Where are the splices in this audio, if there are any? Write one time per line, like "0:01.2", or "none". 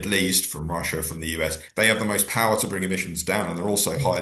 0:01.6

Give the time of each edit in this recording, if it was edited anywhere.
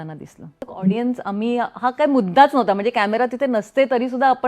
0:00.9

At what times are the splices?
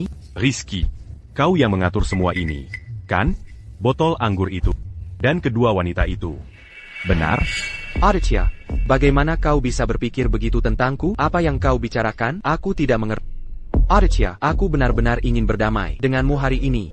none

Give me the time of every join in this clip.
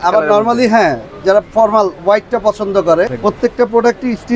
0:03.1

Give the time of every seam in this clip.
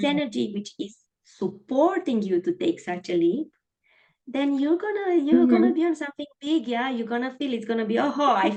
none

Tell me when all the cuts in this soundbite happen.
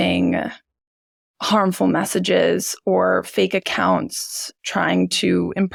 none

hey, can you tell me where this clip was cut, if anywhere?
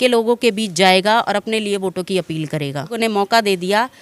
0:02.9

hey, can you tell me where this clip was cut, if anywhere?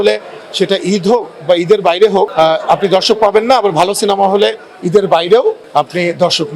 0:02.3
0:05.6

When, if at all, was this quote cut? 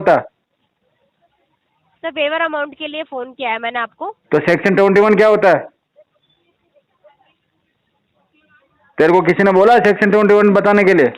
none

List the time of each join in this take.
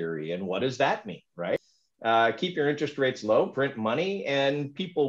0:01.6

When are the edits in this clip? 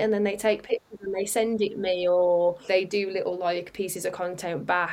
0:02.6

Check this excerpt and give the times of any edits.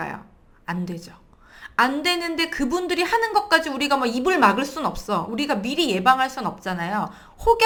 none

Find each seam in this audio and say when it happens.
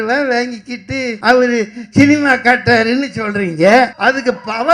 0:01.1
0:03.9

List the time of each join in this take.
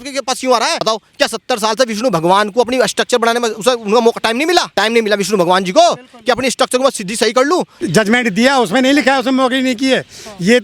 0:00.8
0:04.7
0:07.7

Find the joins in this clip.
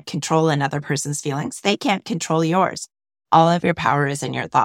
none

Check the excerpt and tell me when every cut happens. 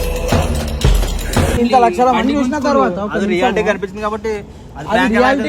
0:01.6

